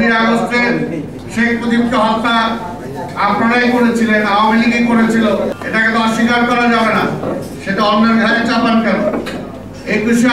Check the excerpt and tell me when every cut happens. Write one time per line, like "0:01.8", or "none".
0:01.2
0:05.5